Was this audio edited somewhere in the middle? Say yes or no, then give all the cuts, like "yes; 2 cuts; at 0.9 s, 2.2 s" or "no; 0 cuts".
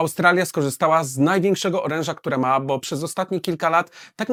no; 0 cuts